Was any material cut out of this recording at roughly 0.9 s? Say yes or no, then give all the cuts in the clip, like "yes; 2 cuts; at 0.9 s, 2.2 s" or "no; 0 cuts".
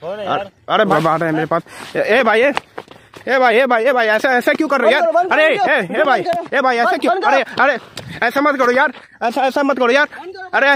yes; 1 cut; at 0.9 s